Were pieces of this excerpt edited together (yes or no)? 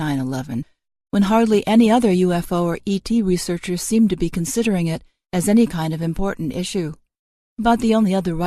no